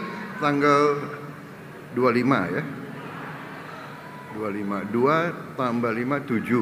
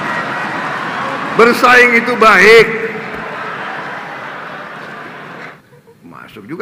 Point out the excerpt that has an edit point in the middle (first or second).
second